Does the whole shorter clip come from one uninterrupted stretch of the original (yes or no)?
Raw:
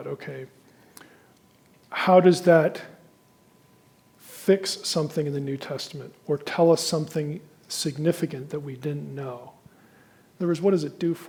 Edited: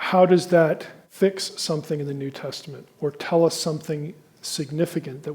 no